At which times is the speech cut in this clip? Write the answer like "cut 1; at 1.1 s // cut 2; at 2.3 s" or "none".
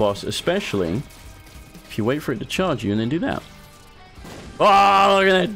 none